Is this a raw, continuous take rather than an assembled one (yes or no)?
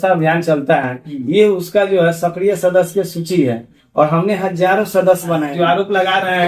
no